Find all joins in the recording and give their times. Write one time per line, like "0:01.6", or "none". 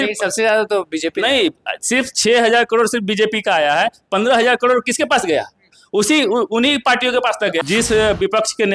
0:07.6